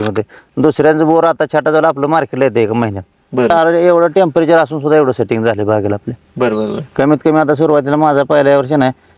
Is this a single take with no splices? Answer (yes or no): no